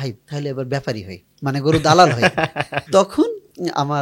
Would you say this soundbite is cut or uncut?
uncut